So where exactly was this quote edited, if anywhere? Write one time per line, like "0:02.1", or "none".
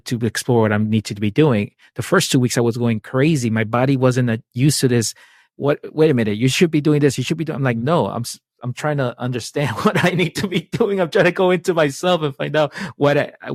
none